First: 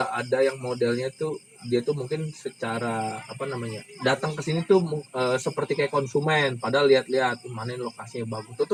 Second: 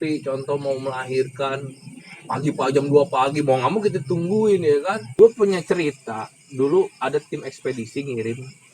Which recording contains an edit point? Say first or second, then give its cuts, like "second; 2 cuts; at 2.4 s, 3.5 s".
second; 1 cut; at 5.0 s